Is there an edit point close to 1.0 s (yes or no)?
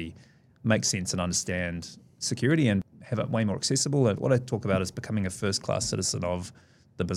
no